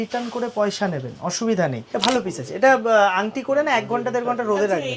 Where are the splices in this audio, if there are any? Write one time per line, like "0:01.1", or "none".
0:01.8